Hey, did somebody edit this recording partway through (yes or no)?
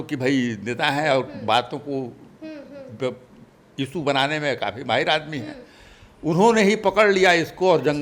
no